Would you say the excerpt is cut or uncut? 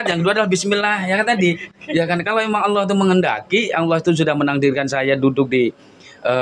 uncut